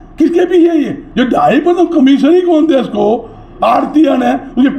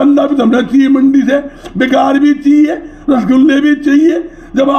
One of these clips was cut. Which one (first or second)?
first